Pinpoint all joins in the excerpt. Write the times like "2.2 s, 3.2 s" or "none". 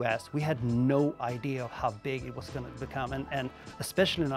none